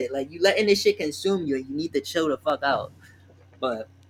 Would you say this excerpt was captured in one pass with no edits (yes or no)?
yes